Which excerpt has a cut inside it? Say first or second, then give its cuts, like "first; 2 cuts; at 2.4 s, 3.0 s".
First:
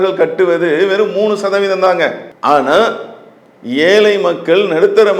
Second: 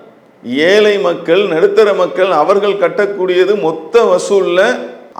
first; 1 cut; at 2.3 s